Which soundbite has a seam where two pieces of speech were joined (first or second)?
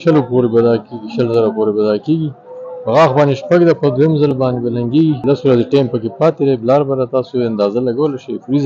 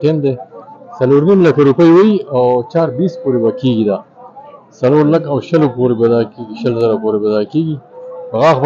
first